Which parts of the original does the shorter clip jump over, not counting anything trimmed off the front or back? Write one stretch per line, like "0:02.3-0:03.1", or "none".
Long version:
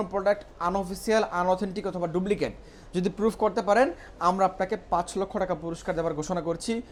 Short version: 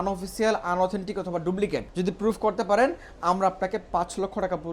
0:02.6-0:02.9